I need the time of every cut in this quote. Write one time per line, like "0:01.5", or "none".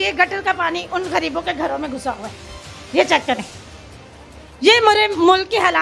none